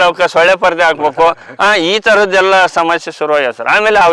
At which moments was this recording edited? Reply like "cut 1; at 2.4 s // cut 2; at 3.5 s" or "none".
cut 1; at 1.5 s